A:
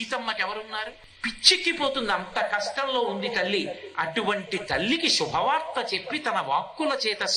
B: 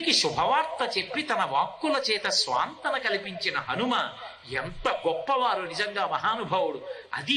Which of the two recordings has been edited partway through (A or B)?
A